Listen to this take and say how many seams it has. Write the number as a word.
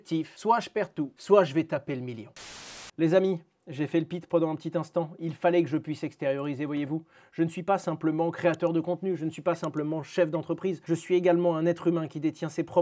one